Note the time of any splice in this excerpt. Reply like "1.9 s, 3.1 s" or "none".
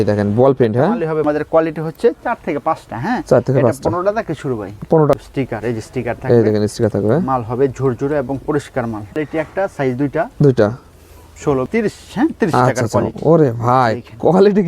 1.2 s, 5.2 s, 9.2 s, 11.7 s